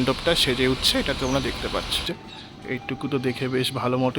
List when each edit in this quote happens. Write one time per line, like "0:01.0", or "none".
0:02.0